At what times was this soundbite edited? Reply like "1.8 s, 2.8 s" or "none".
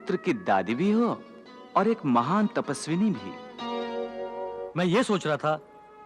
4.6 s